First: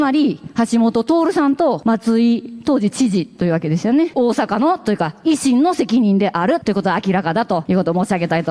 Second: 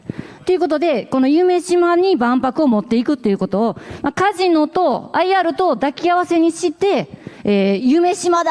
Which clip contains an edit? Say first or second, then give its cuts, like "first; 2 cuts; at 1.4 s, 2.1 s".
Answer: first; 4 cuts; at 1.8 s, 4.1 s, 6.6 s, 7.6 s